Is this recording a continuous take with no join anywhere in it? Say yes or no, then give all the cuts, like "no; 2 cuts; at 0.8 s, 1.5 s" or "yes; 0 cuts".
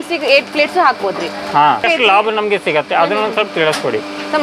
no; 1 cut; at 1.8 s